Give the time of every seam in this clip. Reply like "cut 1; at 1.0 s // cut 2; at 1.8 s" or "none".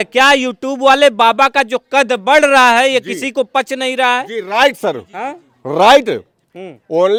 none